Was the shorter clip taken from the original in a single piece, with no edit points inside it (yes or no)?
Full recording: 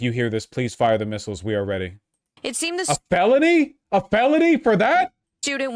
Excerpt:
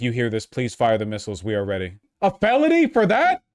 no